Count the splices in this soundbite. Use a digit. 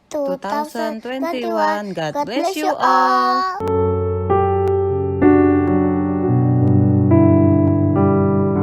1